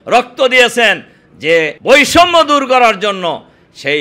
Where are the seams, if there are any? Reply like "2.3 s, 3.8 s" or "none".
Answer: 1.8 s